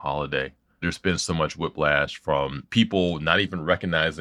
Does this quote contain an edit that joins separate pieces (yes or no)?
yes